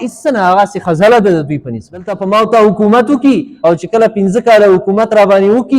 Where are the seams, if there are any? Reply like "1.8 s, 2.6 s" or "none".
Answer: 2.2 s